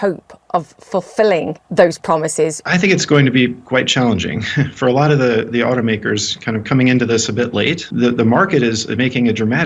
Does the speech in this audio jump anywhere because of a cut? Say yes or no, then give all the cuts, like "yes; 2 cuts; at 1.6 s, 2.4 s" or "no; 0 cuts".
yes; 4 cuts; at 1.6 s, 2.6 s, 4.6 s, 7.8 s